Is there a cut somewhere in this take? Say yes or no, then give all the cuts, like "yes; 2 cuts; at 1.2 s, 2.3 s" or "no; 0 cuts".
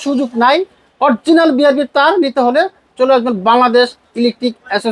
no; 0 cuts